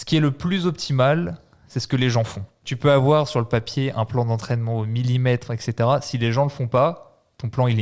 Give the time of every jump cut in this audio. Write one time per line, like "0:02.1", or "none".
0:02.6